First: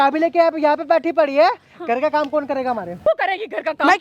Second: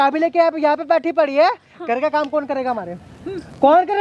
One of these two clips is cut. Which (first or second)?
first